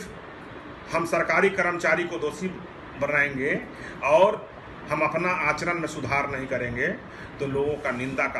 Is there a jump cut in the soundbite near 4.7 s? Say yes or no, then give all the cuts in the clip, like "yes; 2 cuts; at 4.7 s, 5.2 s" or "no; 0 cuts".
no; 0 cuts